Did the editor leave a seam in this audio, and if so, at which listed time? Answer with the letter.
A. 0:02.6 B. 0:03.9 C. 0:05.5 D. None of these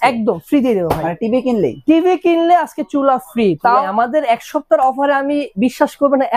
B